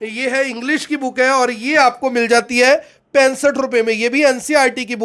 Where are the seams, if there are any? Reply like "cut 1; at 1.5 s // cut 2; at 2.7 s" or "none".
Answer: none